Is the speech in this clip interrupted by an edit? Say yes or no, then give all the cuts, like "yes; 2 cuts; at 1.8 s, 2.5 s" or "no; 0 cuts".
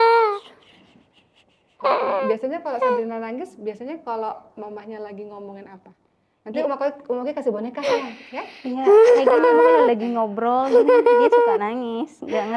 no; 0 cuts